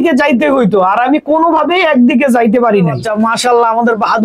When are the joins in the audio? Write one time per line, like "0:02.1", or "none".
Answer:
0:03.0